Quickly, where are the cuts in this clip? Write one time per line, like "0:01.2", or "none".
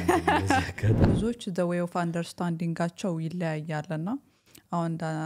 0:01.0